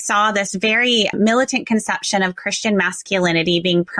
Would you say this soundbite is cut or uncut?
cut